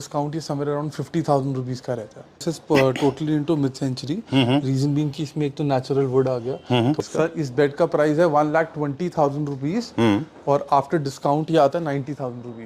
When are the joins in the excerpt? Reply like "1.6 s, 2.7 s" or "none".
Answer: 2.4 s, 7.0 s